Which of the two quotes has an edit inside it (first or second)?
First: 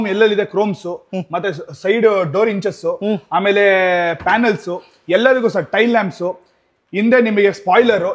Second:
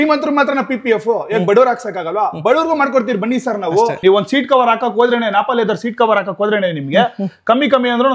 second